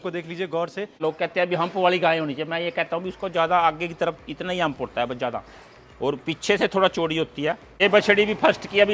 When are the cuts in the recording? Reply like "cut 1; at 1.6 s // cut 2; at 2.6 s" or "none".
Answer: cut 1; at 1.0 s // cut 2; at 7.8 s